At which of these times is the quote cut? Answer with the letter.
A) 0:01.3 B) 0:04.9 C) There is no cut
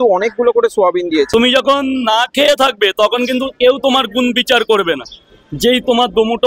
A